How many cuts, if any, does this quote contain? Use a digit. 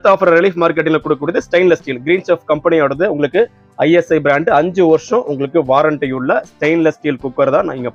0